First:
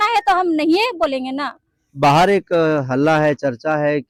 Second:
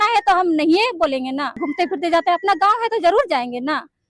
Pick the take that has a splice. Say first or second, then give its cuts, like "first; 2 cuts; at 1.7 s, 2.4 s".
second; 1 cut; at 1.6 s